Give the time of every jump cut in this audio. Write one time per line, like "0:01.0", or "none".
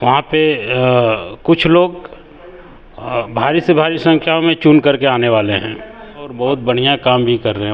0:06.3